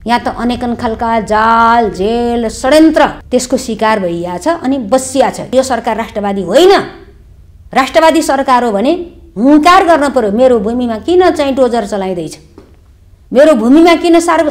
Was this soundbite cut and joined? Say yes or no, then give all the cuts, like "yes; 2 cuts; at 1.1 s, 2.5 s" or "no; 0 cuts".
yes; 2 cuts; at 3.2 s, 5.5 s